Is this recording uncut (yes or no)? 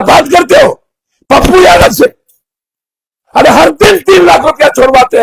yes